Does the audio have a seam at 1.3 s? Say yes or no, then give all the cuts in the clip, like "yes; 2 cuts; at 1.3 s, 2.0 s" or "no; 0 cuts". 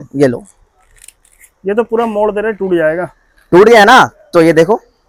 no; 0 cuts